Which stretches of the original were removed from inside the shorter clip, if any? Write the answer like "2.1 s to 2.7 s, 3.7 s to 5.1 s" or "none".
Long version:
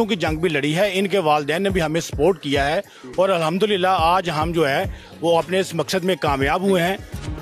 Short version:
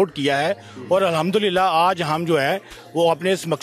none

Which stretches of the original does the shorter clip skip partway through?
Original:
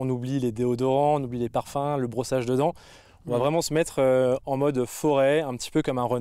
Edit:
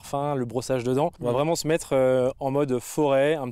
2.8 s to 3.2 s

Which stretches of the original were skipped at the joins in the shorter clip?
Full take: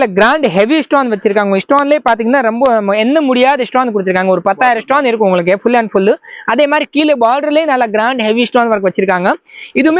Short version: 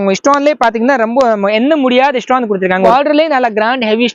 4.3 s to 7.2 s

